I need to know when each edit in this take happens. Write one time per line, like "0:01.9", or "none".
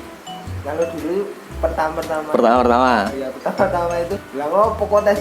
0:04.2